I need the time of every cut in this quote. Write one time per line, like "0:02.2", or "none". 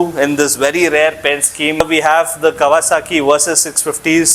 0:01.8